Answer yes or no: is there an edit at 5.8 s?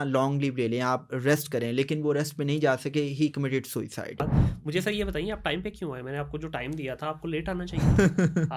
no